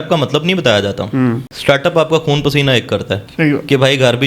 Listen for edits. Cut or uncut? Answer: cut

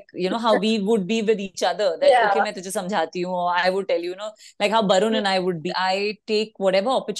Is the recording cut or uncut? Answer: cut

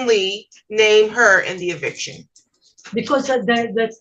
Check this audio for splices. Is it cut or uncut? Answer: uncut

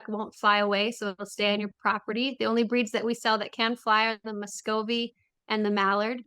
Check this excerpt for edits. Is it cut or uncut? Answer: uncut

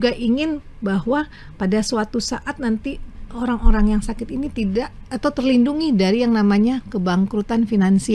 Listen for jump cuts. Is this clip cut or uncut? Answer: uncut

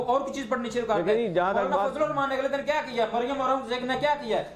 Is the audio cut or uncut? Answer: uncut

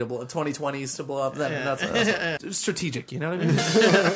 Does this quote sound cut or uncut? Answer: cut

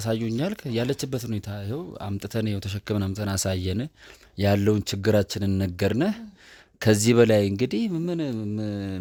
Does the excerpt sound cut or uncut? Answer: uncut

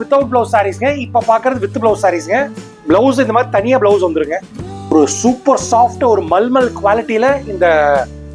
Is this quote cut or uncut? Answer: cut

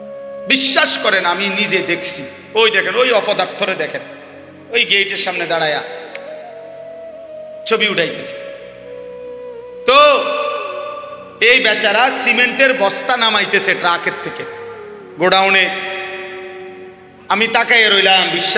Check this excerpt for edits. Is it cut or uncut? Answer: uncut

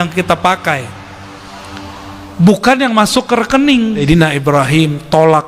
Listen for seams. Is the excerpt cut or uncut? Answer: cut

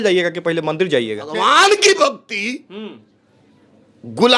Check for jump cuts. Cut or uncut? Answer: cut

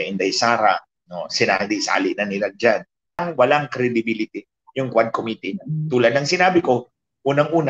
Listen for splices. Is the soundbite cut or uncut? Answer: cut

